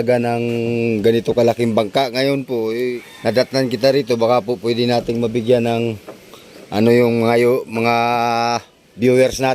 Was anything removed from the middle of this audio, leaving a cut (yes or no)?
yes